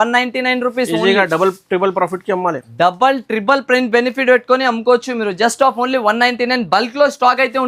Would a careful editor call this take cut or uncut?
uncut